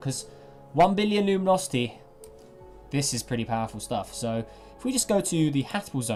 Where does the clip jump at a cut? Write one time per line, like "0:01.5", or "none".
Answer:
none